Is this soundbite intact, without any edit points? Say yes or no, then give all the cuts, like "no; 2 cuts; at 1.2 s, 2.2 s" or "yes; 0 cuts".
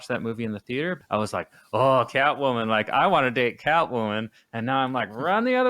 no; 1 cut; at 1.0 s